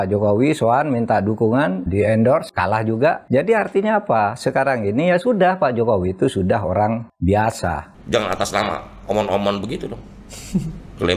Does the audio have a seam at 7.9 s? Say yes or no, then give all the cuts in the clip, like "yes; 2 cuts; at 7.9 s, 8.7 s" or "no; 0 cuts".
yes; 2 cuts; at 2.5 s, 7.9 s